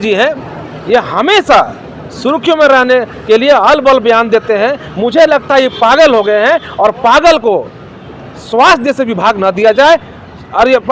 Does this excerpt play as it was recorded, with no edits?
yes; 0 cuts

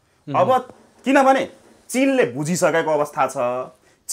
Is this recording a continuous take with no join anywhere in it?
yes; 0 cuts

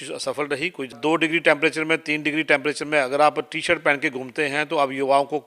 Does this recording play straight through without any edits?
no; 1 cut; at 0.9 s

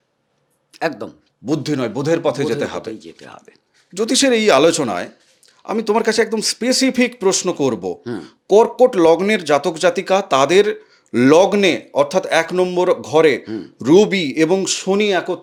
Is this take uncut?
yes; 0 cuts

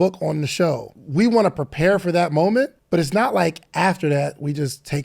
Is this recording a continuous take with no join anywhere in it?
no; 2 cuts; at 0.9 s, 2.8 s

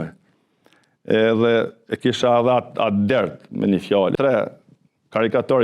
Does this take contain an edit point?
yes; 1 cut; at 4.2 s

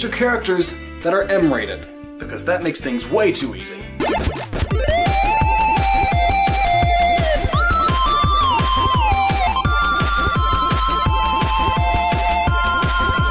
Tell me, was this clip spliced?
yes; 1 cut; at 8.5 s

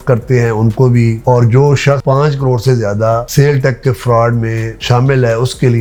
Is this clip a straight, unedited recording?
yes; 0 cuts

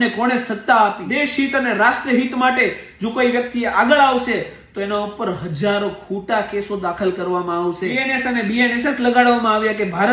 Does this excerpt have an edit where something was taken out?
yes; 2 cuts; at 1.0 s, 8.1 s

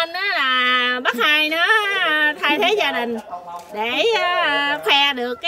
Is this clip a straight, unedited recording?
yes; 0 cuts

